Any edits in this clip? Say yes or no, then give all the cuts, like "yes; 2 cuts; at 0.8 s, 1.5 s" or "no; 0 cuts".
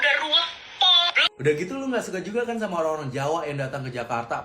yes; 1 cut; at 1.3 s